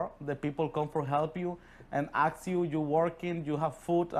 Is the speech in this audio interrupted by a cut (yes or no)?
no